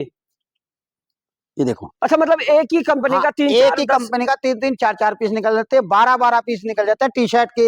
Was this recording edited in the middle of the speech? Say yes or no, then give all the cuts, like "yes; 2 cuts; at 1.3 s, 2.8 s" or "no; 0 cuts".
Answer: no; 0 cuts